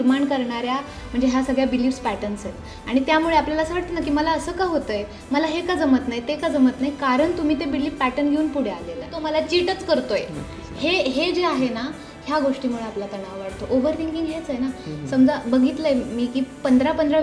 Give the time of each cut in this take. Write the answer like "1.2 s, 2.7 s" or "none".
9.2 s